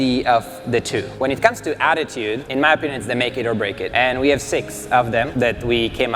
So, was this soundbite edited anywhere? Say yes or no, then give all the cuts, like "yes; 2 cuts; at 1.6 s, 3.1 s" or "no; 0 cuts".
yes; 4 cuts; at 1.1 s, 2.4 s, 3.9 s, 5.3 s